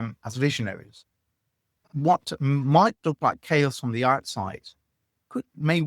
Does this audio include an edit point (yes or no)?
yes